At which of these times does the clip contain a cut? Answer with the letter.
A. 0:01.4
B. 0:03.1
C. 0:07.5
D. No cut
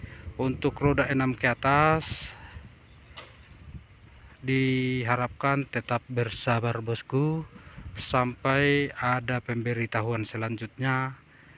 D